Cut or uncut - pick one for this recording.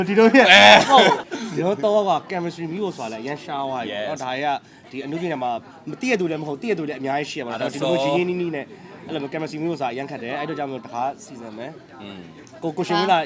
cut